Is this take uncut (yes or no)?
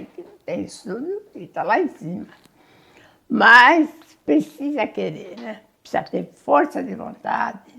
yes